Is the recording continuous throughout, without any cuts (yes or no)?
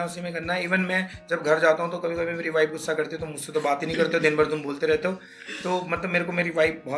yes